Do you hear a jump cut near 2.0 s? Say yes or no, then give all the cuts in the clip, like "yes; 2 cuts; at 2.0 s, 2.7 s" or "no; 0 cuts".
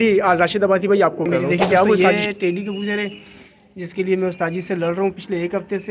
yes; 1 cut; at 2.0 s